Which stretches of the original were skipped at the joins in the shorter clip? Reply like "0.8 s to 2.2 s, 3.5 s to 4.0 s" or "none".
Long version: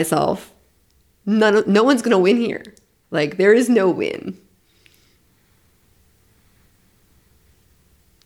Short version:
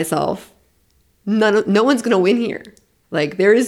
none